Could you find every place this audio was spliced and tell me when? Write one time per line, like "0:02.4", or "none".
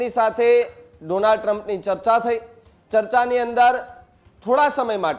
none